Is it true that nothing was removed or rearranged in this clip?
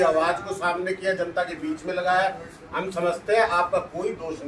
yes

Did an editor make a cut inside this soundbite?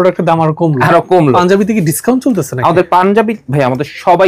yes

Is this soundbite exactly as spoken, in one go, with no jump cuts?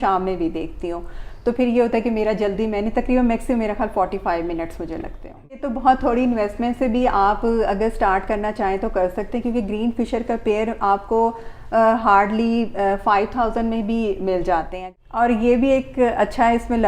no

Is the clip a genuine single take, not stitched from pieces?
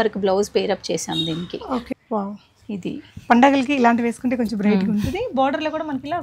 no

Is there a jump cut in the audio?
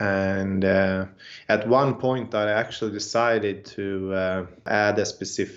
yes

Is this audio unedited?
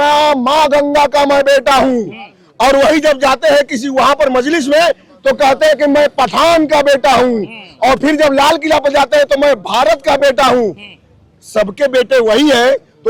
yes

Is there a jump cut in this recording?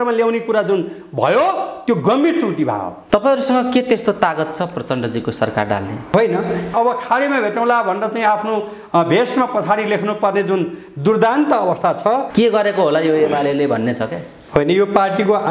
yes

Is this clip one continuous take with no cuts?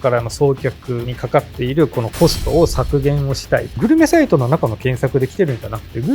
no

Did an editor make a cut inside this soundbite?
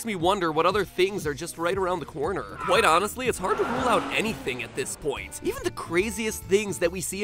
yes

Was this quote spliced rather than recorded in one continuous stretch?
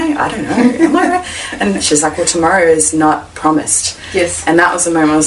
no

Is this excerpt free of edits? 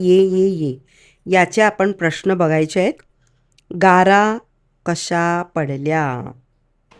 yes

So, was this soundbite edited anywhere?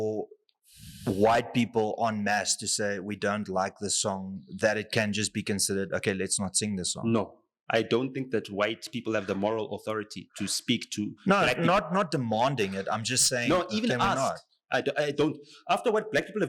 no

